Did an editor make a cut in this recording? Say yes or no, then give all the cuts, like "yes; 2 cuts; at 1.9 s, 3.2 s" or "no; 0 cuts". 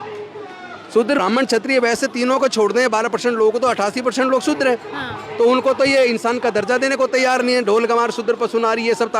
yes; 1 cut; at 1.2 s